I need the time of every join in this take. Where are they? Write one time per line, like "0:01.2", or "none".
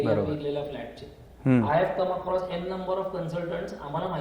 none